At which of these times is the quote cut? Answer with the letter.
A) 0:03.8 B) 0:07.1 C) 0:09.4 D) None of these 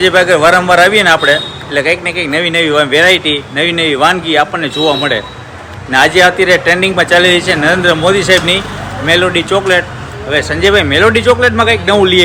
D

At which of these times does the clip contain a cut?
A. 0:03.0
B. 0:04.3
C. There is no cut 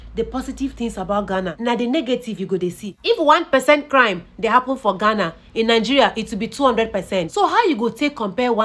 A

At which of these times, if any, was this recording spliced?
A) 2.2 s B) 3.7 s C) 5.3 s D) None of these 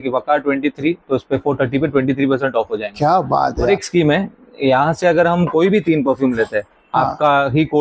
B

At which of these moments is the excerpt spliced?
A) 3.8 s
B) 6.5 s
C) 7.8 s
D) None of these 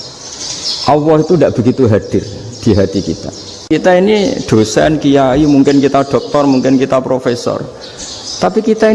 A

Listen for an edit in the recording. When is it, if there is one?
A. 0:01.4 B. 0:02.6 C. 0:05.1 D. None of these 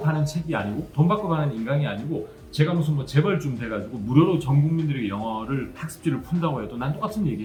D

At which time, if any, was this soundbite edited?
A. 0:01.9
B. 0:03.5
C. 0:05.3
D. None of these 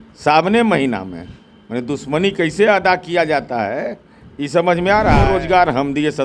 C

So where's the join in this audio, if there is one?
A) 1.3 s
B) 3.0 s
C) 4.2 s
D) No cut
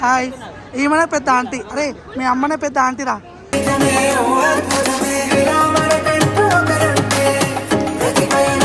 D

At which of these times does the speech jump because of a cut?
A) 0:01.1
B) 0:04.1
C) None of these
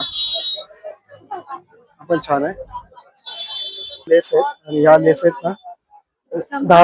B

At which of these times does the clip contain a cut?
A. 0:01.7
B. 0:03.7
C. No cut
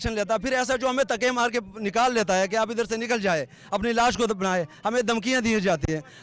C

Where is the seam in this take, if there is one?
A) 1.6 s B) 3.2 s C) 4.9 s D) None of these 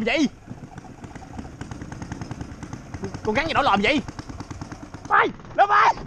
C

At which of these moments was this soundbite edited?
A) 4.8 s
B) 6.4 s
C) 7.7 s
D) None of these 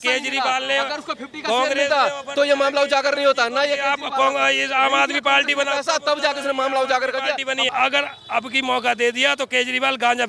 C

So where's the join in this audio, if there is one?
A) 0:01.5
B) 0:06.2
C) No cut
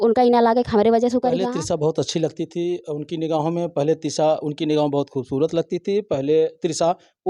A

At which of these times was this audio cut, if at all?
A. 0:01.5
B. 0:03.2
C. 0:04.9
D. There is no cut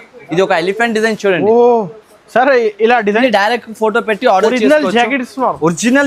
B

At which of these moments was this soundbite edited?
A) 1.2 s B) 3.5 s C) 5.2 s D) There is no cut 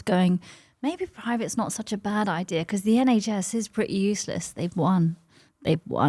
D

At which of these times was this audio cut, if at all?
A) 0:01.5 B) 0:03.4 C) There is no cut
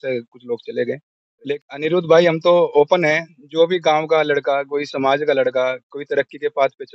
A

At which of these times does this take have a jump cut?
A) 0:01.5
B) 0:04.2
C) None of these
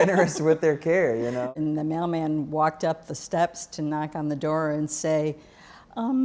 A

